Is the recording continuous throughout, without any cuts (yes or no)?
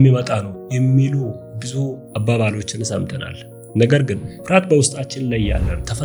yes